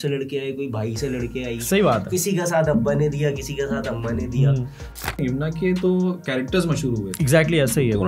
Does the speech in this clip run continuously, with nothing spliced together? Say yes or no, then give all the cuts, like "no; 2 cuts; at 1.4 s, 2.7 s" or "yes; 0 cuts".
no; 1 cut; at 5.1 s